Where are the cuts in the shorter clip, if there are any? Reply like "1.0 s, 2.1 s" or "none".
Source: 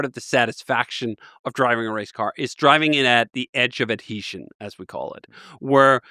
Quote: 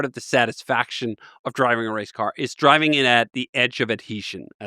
none